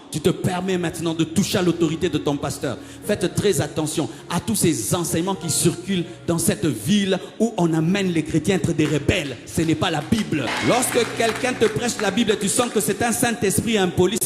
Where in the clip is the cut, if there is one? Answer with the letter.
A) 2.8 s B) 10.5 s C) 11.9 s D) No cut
B